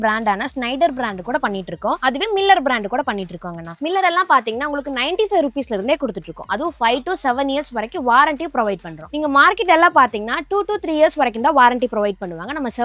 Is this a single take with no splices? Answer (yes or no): yes